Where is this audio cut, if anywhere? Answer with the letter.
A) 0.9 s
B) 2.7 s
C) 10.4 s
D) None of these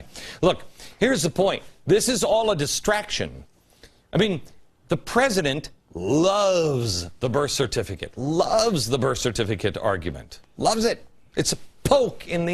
B